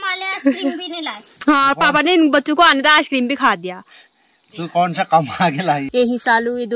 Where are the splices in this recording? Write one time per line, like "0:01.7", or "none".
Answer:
0:05.9